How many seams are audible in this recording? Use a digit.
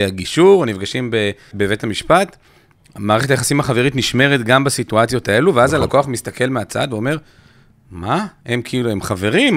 1